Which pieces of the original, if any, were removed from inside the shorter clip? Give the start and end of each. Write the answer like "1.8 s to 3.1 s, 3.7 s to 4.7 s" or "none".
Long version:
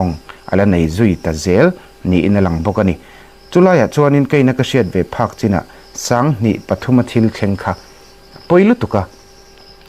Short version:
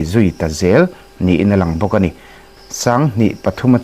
3.3 s to 5.7 s